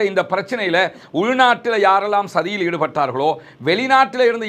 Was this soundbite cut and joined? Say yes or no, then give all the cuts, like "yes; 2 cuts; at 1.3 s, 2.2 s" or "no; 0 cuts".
no; 0 cuts